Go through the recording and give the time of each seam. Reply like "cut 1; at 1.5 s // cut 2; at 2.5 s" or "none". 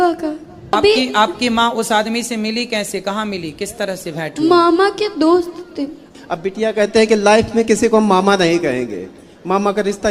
cut 1; at 0.7 s // cut 2; at 6.1 s